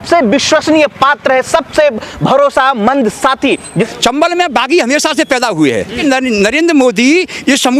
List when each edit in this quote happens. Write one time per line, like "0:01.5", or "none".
0:03.9
0:06.0